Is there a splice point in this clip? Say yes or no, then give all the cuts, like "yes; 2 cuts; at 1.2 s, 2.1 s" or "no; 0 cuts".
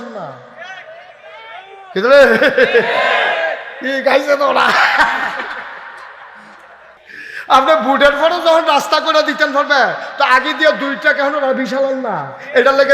yes; 1 cut; at 7.0 s